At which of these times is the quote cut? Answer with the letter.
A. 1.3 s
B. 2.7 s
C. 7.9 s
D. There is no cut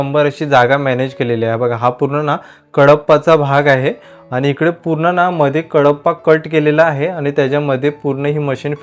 D